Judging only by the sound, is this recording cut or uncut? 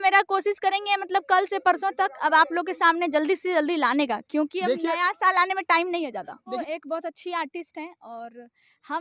cut